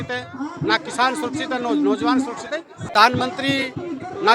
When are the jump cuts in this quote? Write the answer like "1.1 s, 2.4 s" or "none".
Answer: 2.7 s